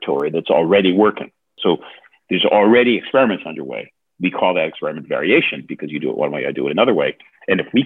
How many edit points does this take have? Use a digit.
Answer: 1